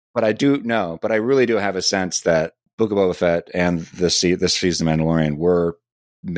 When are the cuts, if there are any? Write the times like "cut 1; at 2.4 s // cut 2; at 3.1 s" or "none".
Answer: cut 1; at 2.7 s